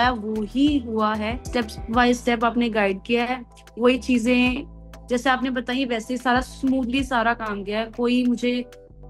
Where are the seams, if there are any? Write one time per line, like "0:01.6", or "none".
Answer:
0:01.4